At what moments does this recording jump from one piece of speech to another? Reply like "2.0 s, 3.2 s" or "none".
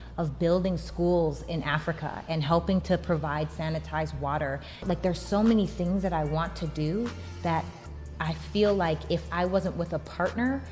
4.8 s

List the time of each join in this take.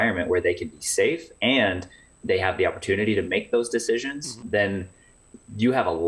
4.4 s

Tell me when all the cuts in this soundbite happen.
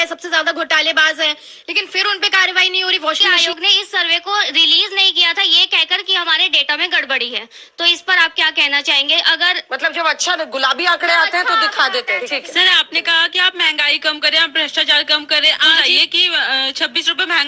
3.3 s, 12.4 s, 15.8 s

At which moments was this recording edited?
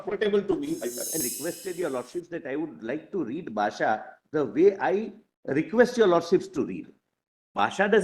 1.2 s

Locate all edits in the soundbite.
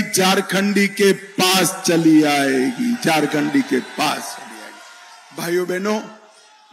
none

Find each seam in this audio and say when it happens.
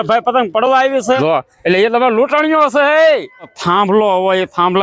1.2 s, 3.6 s

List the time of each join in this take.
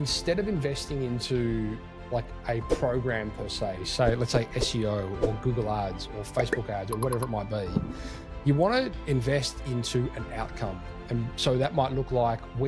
none

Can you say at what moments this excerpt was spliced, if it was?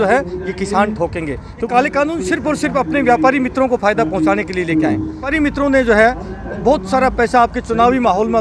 1.5 s, 5.3 s

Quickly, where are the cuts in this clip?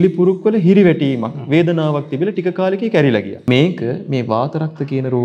3.5 s

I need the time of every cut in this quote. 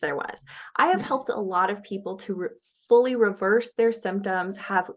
none

